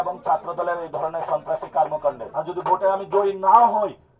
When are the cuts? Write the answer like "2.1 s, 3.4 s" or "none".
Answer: 2.2 s